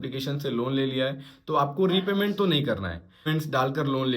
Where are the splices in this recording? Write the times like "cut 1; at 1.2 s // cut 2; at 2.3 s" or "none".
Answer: cut 1; at 3.2 s